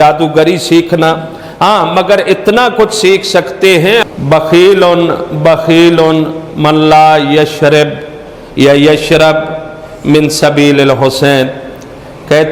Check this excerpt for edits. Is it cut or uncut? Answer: cut